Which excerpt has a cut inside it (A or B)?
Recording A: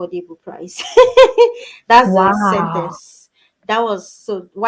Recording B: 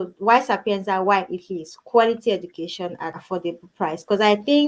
B